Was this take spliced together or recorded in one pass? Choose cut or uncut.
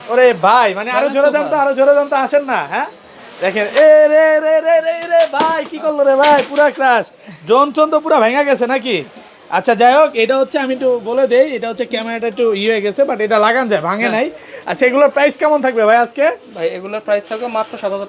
uncut